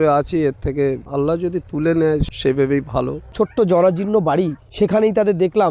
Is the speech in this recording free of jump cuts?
no; 2 cuts; at 2.3 s, 3.3 s

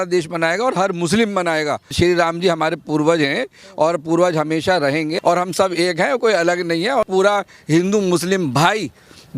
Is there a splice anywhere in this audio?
yes; 3 cuts; at 1.9 s, 5.1 s, 7.1 s

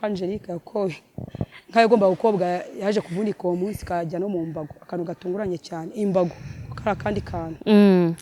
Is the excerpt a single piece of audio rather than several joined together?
yes; 0 cuts

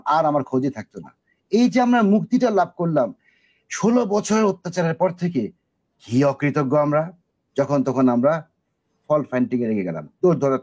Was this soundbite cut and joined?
no; 0 cuts

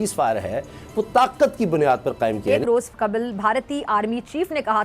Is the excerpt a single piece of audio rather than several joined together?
no; 1 cut; at 2.5 s

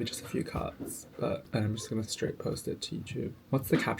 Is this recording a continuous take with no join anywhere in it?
no; 1 cut; at 1.4 s

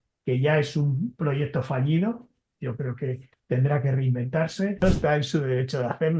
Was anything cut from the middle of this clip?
yes; 1 cut; at 4.8 s

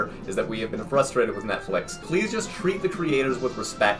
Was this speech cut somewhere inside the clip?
yes; 1 cut; at 2.1 s

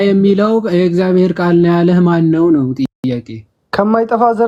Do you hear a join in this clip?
no; 0 cuts

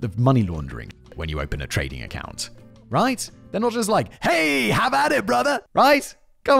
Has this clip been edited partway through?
yes; 1 cut; at 5.6 s

